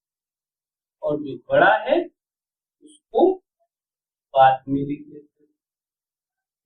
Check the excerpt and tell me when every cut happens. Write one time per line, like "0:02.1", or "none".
none